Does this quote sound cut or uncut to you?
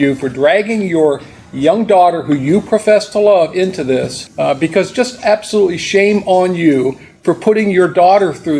cut